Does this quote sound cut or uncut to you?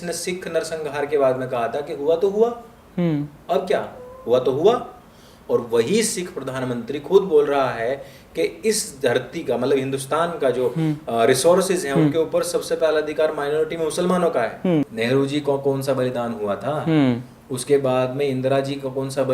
cut